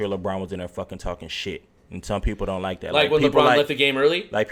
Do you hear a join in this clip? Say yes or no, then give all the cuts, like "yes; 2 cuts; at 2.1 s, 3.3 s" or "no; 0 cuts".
no; 0 cuts